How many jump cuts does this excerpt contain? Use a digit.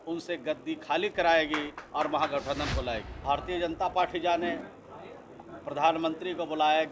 1